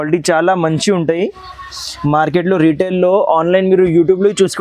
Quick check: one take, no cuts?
yes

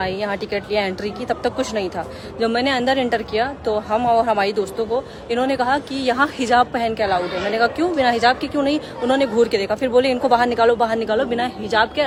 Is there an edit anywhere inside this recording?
no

